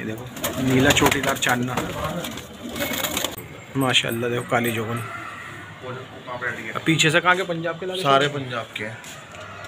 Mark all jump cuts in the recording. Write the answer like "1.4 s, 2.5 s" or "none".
3.4 s